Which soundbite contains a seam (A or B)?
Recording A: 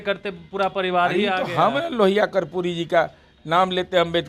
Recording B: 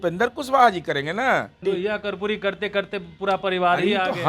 B